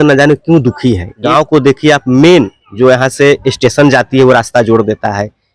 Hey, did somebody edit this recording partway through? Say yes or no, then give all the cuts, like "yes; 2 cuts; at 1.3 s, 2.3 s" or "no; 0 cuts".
yes; 1 cut; at 1.2 s